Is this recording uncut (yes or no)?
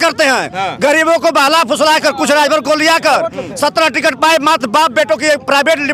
yes